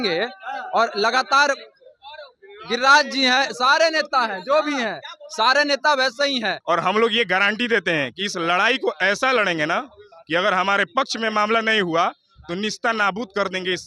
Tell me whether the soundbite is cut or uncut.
cut